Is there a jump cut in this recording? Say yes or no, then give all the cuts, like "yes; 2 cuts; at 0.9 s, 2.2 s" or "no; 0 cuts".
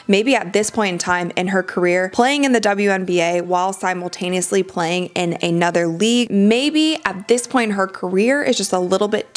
yes; 2 cuts; at 2.1 s, 6.3 s